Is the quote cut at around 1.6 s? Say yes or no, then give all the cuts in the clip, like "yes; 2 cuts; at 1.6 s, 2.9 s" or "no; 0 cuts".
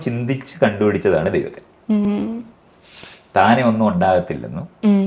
no; 0 cuts